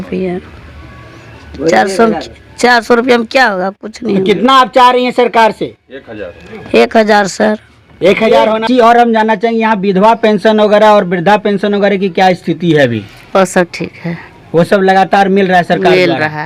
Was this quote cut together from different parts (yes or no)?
yes